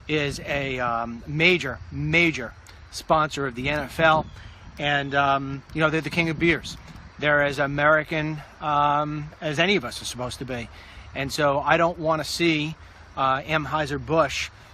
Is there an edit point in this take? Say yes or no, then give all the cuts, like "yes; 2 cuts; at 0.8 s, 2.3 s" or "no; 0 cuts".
no; 0 cuts